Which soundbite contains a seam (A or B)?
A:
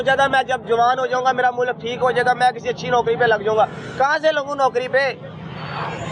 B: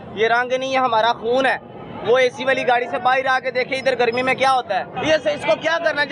B